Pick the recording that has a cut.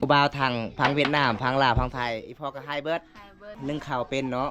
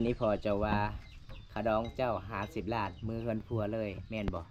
first; 1 cut; at 3.5 s

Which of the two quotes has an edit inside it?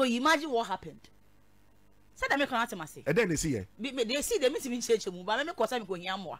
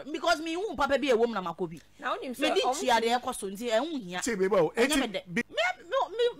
second; 1 cut; at 5.4 s

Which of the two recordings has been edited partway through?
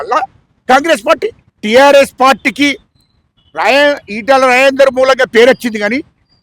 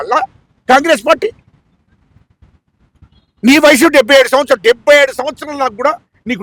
first; 1 cut; at 1.5 s

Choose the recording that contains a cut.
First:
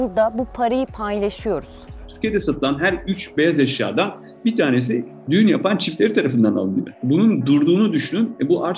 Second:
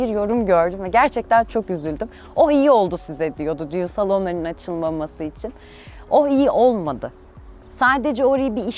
first; 2 cuts; at 2.0 s, 6.9 s

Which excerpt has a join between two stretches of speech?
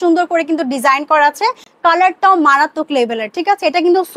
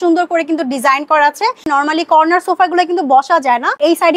second; 1 cut; at 1.6 s

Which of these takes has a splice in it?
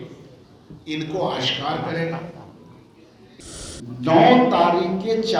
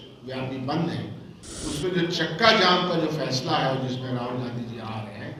first; 1 cut; at 3.4 s

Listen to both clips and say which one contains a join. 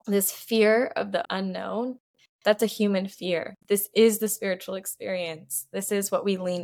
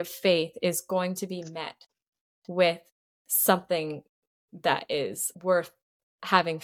second; 1 cut; at 5.3 s

